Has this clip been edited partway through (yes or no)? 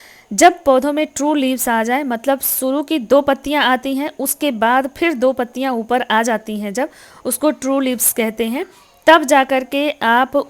no